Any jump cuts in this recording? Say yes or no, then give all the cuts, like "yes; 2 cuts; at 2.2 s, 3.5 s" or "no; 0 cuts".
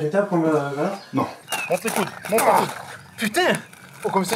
yes; 1 cut; at 1.4 s